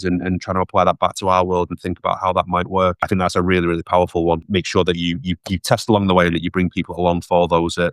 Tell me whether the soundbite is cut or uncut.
cut